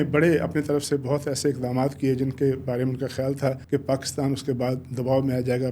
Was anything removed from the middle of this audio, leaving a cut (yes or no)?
yes